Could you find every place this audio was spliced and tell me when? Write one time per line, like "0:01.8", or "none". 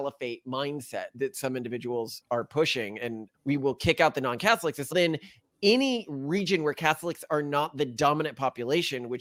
none